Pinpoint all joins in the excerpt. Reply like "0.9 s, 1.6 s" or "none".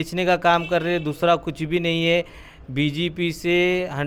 none